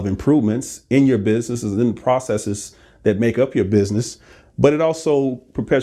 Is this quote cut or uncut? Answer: uncut